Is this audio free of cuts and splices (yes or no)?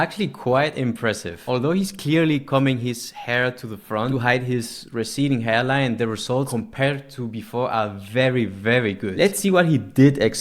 no